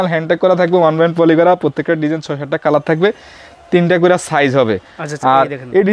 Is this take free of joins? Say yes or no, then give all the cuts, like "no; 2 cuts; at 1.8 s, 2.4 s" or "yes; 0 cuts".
yes; 0 cuts